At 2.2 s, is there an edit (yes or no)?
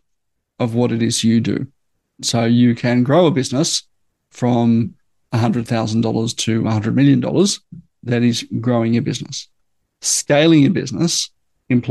yes